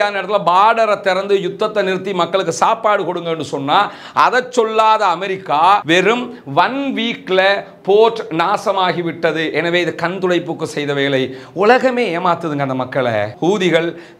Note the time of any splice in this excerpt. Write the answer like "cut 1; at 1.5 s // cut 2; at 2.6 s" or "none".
cut 1; at 5.8 s // cut 2; at 13.3 s